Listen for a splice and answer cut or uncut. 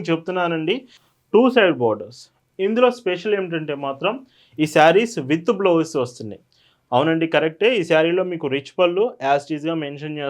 cut